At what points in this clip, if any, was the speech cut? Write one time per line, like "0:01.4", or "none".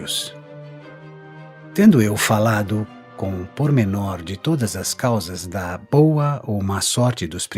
0:02.7